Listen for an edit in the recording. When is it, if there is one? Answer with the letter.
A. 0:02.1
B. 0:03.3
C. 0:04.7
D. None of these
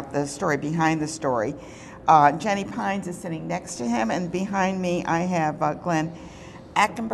B